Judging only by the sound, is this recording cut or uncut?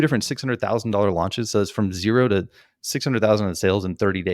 uncut